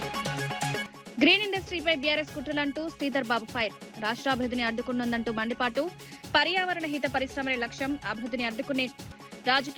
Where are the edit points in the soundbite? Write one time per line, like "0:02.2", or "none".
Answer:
0:00.9

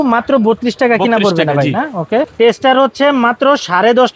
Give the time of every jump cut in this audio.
0:02.3

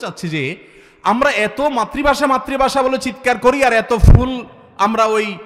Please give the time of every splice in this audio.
none

